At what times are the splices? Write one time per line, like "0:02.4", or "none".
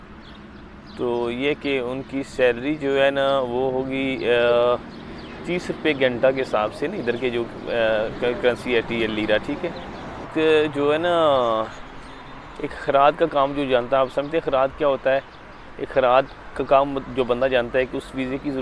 0:10.3